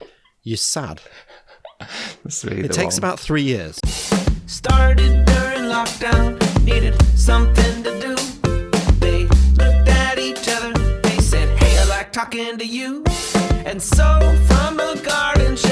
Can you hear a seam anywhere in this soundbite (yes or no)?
yes